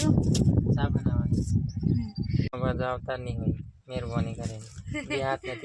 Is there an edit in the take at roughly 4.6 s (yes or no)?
no